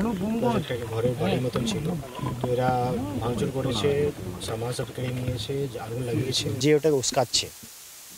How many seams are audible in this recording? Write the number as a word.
one